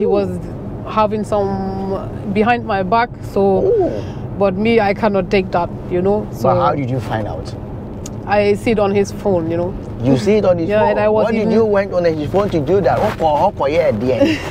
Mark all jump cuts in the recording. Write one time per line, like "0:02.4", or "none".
none